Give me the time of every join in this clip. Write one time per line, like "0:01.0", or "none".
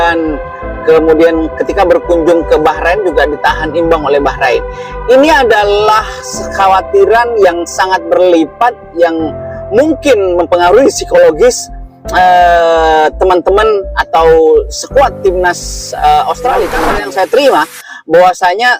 0:16.9